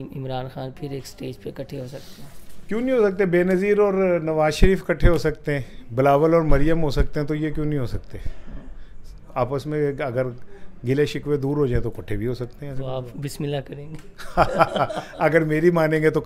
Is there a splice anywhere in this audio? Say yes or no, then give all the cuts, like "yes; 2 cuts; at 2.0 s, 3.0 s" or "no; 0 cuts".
no; 0 cuts